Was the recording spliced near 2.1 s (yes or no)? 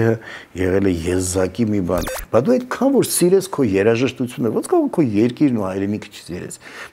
yes